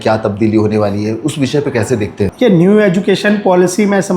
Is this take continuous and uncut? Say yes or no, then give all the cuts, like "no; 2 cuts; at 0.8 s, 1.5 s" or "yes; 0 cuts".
yes; 0 cuts